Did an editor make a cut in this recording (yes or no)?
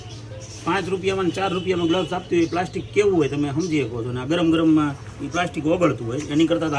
no